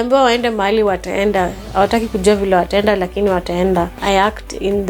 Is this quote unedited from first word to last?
no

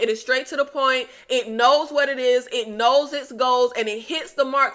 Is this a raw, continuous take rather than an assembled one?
yes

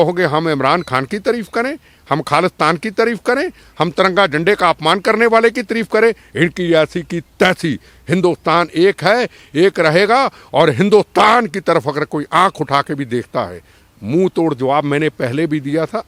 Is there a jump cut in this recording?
no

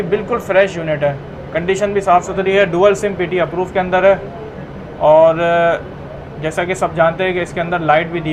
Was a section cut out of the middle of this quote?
no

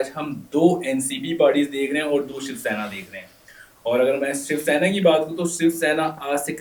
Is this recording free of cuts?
yes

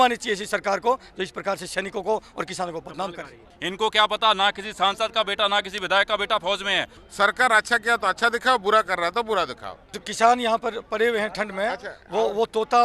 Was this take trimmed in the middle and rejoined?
yes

